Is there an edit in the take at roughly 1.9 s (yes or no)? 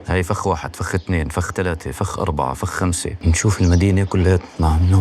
no